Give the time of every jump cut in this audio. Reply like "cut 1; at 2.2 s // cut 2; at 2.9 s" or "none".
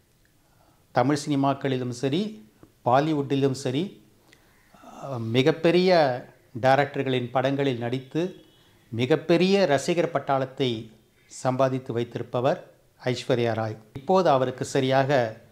cut 1; at 14.0 s